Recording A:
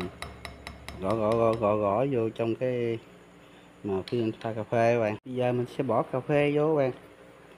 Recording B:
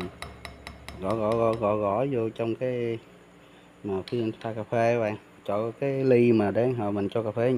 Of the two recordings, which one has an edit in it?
A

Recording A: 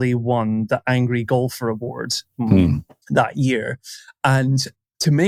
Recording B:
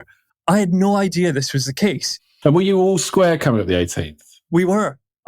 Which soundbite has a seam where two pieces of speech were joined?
B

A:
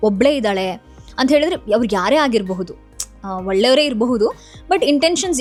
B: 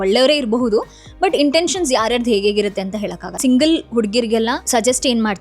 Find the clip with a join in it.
B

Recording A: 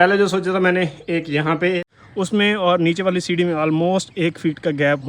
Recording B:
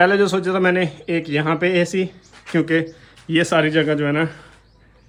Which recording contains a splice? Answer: A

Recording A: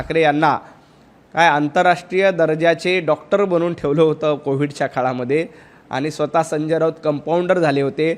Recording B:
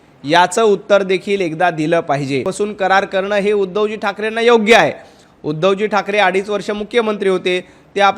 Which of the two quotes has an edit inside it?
B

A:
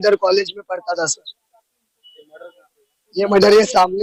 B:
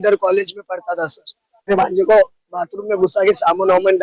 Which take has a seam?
B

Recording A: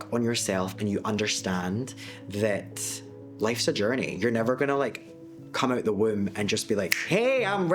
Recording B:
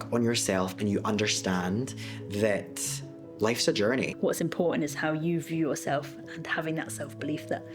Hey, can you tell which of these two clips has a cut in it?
B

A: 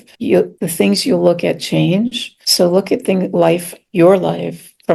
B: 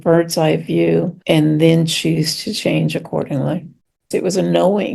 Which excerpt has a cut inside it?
B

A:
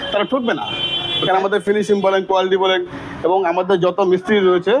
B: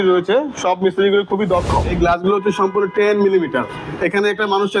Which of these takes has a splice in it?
B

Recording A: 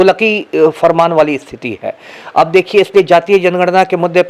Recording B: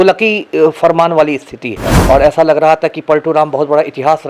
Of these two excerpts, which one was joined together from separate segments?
B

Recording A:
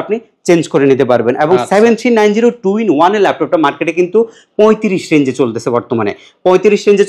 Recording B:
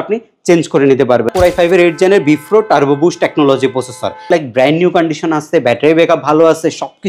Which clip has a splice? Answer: B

